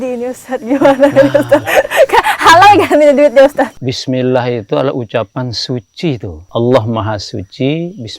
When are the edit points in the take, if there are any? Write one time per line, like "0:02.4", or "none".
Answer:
0:03.8
0:06.4